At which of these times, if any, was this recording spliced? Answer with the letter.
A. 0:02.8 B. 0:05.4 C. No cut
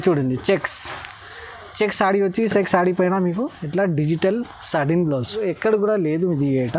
B